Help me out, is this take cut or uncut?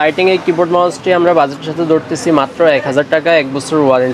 uncut